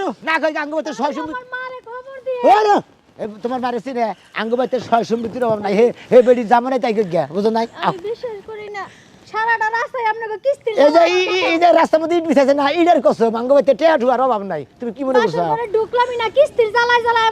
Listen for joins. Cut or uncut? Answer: uncut